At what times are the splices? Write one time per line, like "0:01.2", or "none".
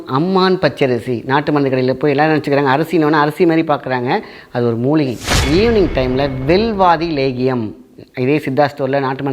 0:05.3